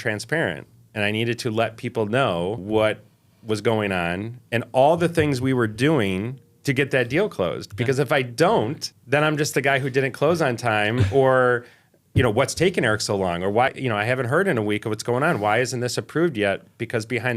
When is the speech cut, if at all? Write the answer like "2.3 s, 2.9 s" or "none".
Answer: 2.6 s, 8.9 s, 13.7 s